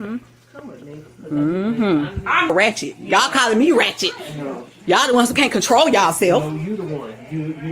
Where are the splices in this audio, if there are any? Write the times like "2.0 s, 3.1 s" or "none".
2.5 s